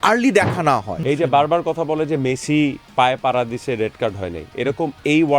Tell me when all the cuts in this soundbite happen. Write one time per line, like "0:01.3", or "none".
0:00.9